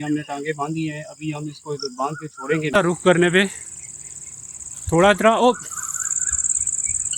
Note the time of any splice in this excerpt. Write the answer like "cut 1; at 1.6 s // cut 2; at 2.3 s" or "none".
cut 1; at 2.7 s

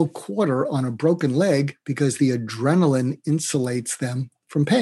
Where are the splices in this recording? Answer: cut 1; at 1.8 s

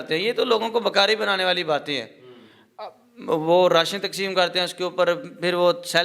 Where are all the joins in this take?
none

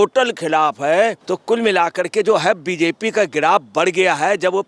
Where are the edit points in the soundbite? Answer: cut 1; at 1.3 s

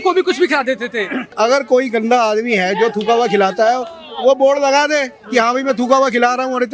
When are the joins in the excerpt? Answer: cut 1; at 1.2 s

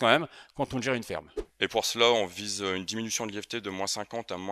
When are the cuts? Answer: cut 1; at 1.4 s

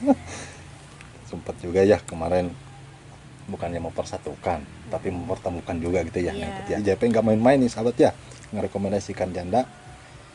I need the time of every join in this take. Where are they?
cut 1; at 6.8 s

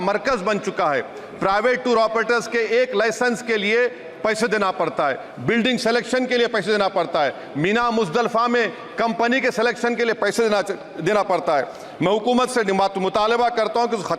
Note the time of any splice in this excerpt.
none

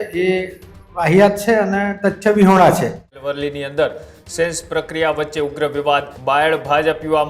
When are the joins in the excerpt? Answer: cut 1; at 3.2 s // cut 2; at 6.1 s

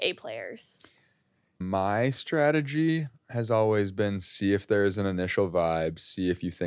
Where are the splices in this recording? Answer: cut 1; at 1.6 s

